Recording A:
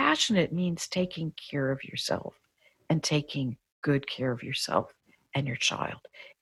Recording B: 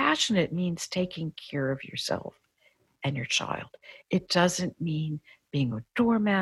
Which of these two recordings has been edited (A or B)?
B